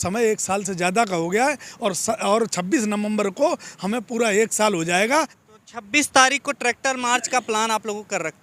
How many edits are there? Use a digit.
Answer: 1